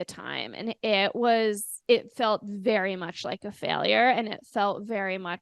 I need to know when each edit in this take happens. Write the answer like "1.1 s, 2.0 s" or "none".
1.7 s